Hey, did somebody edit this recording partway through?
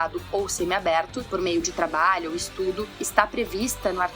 no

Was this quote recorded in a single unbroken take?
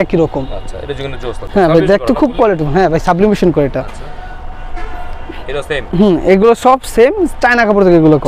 yes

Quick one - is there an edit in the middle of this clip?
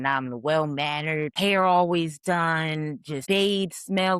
yes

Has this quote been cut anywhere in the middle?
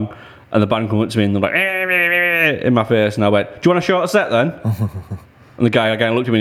no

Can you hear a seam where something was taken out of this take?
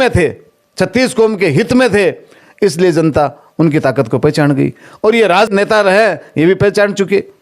yes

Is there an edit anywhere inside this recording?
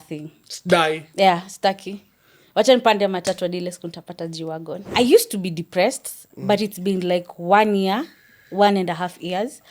yes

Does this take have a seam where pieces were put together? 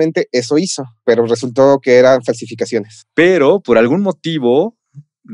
yes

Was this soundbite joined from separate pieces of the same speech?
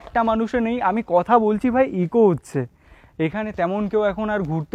no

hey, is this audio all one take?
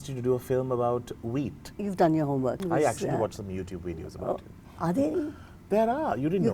no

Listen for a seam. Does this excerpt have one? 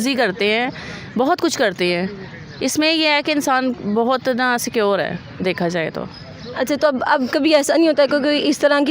no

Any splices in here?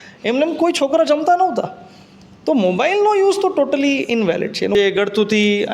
yes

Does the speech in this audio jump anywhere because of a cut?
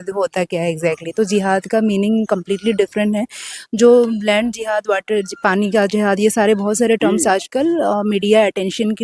no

